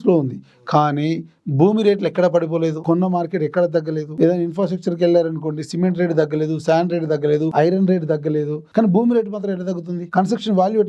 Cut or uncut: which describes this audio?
cut